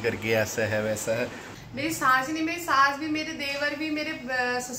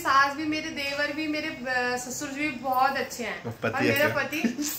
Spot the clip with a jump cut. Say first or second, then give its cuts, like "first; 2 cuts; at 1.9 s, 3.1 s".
first; 1 cut; at 1.5 s